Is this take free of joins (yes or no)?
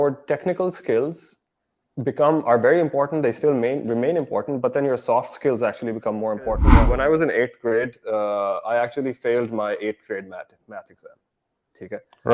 no